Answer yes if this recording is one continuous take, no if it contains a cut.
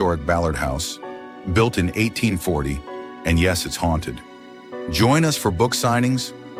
yes